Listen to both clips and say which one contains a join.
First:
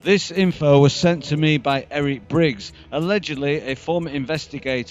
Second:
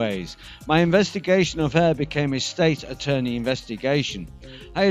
first; 1 cut; at 1.3 s

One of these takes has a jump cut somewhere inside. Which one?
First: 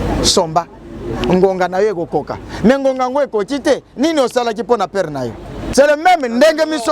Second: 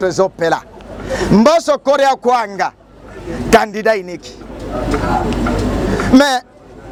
first; 1 cut; at 5.5 s

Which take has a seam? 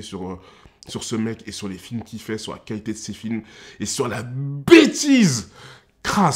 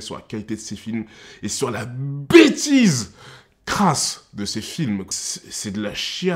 second; 1 cut; at 5.1 s

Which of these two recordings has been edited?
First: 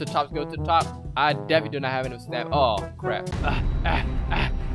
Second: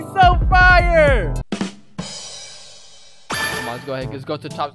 second; 1 cut; at 3.4 s

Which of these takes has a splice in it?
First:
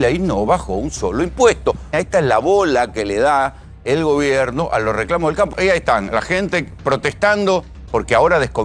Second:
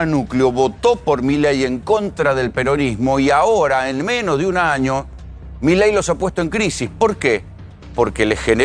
first; 3 cuts; at 1.9 s, 5.5 s, 7.8 s

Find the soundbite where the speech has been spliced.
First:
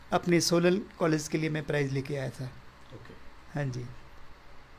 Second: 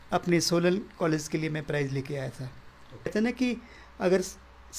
second; 1 cut; at 3.1 s

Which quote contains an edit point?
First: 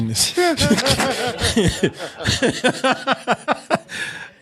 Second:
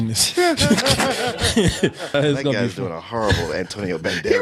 second; 1 cut; at 2.1 s

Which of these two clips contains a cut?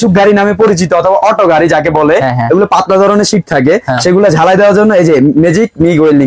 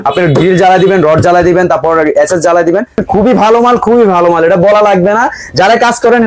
second; 1 cut; at 3.0 s

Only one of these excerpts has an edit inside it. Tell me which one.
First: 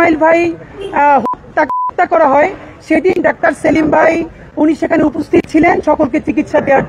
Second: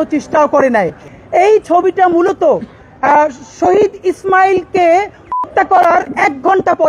second; 1 cut; at 1.1 s

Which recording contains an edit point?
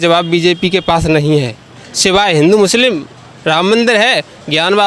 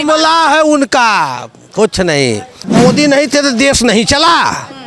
second; 1 cut; at 2.6 s

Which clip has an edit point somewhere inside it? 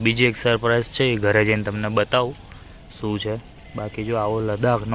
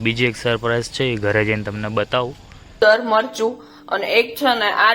second; 1 cut; at 2.8 s

